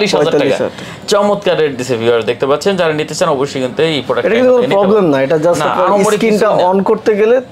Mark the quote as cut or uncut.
uncut